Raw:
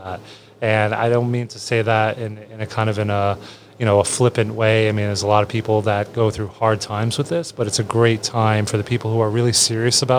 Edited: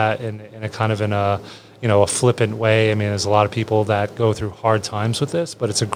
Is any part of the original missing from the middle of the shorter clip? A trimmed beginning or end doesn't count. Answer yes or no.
no